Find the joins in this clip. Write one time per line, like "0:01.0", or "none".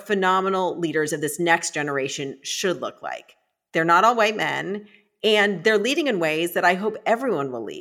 none